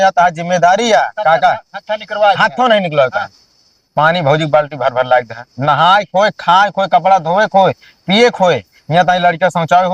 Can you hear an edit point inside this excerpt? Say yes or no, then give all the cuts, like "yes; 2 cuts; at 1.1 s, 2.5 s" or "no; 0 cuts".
no; 0 cuts